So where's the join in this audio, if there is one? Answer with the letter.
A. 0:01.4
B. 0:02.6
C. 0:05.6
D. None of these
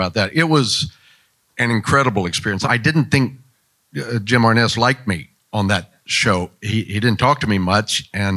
B